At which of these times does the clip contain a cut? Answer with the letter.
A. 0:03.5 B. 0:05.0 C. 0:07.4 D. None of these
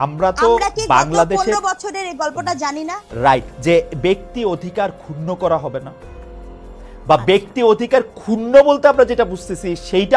A